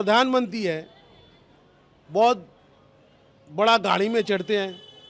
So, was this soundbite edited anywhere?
no; 0 cuts

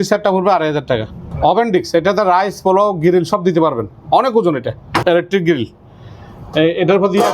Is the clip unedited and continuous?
no; 2 cuts; at 1.2 s, 5.0 s

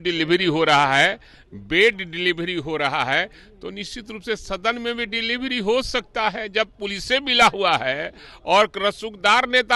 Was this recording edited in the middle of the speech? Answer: no; 0 cuts

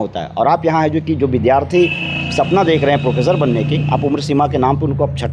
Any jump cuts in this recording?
no; 0 cuts

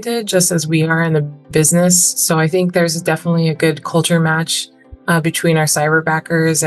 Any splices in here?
no; 0 cuts

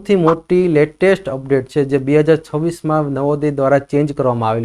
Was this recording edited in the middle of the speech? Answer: no; 0 cuts

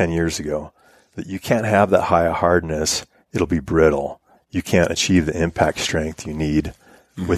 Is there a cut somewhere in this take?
no; 0 cuts

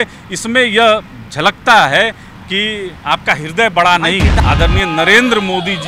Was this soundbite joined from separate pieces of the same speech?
yes; 1 cut; at 4.4 s

